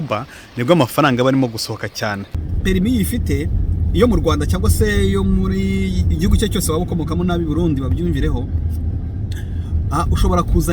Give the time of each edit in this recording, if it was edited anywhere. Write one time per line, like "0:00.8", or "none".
0:02.3